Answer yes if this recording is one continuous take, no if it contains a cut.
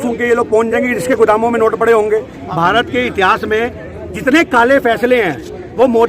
no